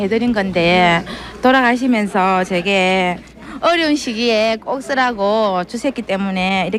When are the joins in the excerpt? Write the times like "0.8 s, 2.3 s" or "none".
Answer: none